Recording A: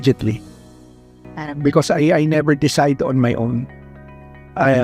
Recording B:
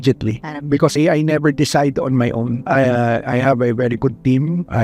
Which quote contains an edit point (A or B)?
B